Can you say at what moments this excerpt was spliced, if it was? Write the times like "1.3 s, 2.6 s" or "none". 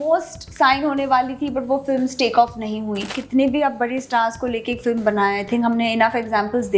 3.1 s